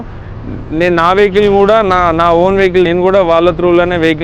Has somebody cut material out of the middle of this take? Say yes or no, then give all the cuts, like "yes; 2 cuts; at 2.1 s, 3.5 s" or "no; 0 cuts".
yes; 1 cut; at 2.9 s